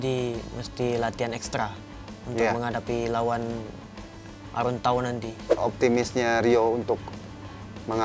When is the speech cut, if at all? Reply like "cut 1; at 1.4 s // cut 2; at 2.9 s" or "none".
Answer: cut 1; at 5.5 s